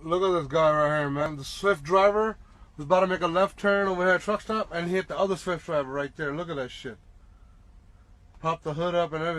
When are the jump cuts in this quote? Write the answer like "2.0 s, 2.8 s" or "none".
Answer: 1.3 s

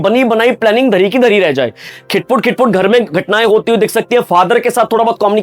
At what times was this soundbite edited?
1.9 s

